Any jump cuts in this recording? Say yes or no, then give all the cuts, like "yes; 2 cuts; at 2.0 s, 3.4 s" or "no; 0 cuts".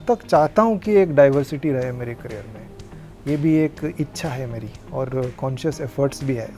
no; 0 cuts